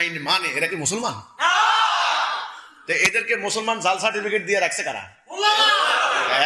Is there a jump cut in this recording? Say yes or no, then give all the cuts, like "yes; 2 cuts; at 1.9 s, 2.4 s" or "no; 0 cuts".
no; 0 cuts